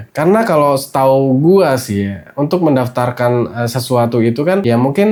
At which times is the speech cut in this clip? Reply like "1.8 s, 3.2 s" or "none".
none

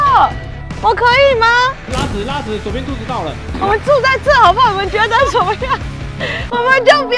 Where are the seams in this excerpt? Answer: none

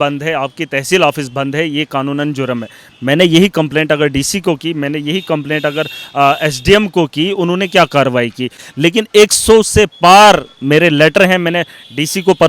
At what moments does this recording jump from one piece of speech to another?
8.6 s

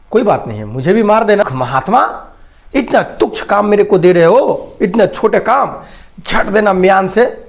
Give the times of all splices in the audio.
1.4 s

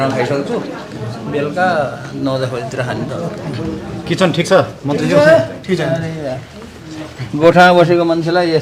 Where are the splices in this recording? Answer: none

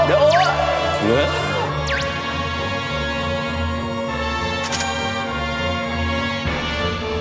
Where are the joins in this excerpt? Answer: none

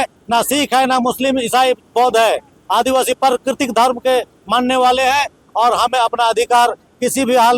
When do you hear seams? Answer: none

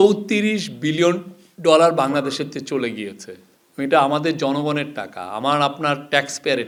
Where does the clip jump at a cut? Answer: none

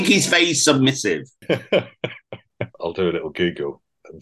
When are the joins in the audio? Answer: 1.3 s, 2.8 s

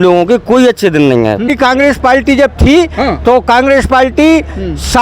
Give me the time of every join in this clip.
1.5 s

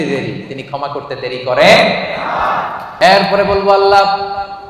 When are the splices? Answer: 2.9 s

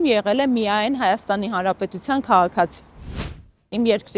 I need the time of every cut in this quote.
3.2 s

